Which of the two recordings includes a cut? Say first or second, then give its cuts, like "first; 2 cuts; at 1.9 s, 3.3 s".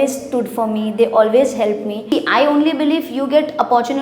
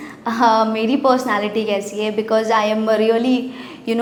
first; 1 cut; at 2.1 s